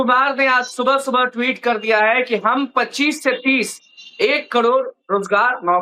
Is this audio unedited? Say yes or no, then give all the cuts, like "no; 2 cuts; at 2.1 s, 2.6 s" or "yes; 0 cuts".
yes; 0 cuts